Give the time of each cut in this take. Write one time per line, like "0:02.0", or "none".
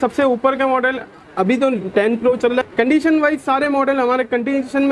0:02.6